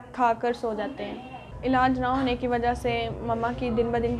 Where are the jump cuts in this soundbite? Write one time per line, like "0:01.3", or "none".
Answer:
0:01.4